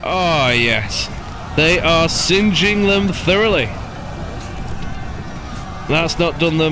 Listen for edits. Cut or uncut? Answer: uncut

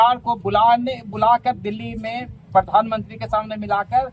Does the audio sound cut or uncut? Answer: uncut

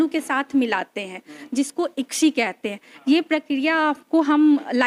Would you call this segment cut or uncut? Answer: uncut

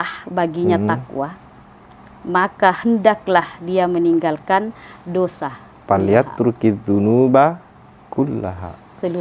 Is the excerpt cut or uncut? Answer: uncut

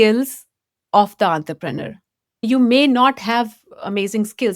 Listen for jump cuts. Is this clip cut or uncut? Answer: uncut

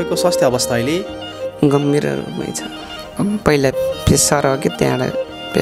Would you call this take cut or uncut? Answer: cut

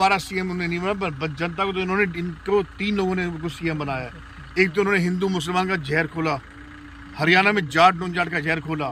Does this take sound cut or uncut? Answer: uncut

